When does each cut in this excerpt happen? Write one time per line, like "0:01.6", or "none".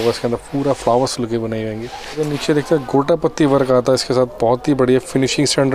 0:02.2